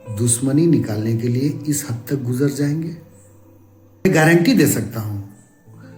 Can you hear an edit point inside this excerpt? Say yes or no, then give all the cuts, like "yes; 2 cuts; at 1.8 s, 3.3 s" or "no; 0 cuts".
yes; 1 cut; at 4.0 s